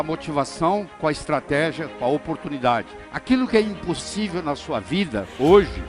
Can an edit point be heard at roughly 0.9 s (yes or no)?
no